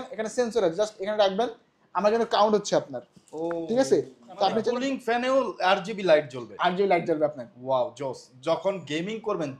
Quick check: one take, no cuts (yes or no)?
no